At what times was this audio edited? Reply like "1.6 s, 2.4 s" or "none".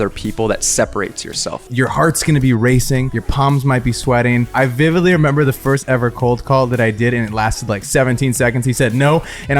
1.7 s, 3.2 s, 4.5 s